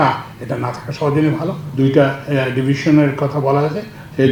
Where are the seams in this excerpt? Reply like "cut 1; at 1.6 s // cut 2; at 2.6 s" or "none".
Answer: none

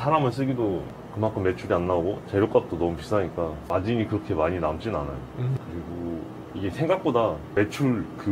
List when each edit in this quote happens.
none

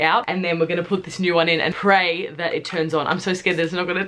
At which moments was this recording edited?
none

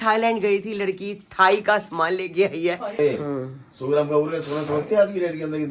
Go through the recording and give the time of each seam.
cut 1; at 3.0 s

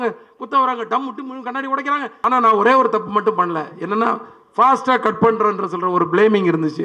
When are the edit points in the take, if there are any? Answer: cut 1; at 2.1 s

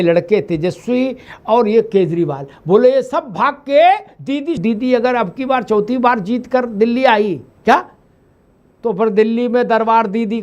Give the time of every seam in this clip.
cut 1; at 4.6 s

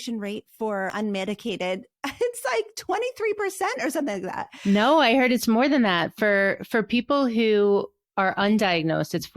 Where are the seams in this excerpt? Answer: cut 1; at 0.9 s // cut 2; at 4.4 s

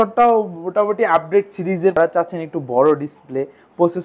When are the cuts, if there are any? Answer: cut 1; at 2.0 s

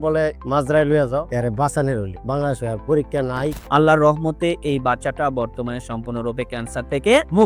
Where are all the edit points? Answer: cut 1; at 1.3 s // cut 2; at 3.6 s

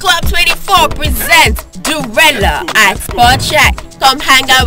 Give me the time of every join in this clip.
none

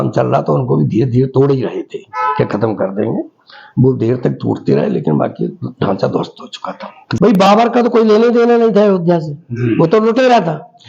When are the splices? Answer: cut 1; at 7.0 s

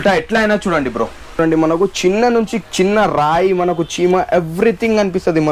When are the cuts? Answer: cut 1; at 1.4 s

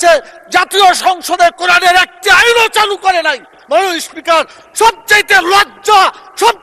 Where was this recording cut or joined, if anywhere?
none

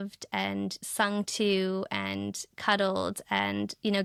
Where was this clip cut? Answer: none

